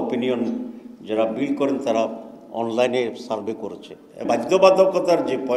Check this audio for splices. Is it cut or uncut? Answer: cut